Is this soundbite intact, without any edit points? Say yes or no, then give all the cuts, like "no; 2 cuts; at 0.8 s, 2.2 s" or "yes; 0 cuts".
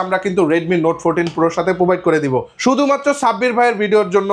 no; 1 cut; at 2.5 s